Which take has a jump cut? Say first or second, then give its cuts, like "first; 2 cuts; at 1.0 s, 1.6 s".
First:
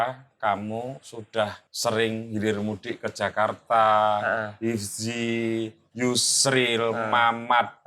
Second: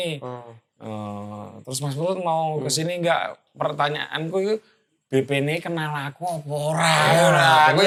first; 1 cut; at 1.7 s